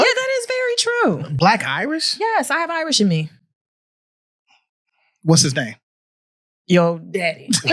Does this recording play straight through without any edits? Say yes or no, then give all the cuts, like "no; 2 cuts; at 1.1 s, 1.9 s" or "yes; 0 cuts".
yes; 0 cuts